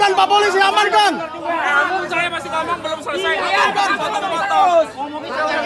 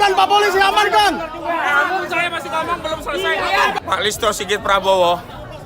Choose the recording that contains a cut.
second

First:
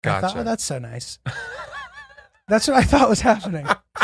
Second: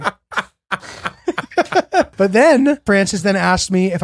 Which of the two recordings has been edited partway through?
second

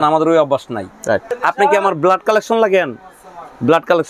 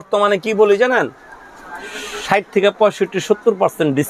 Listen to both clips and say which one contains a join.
first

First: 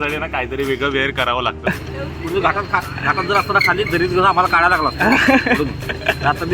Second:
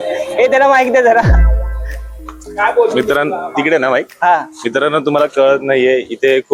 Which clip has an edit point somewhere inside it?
first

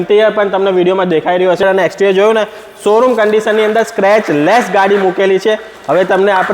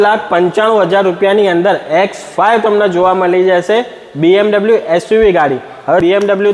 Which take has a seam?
first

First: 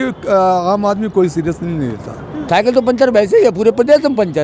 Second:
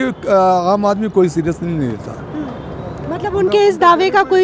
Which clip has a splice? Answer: first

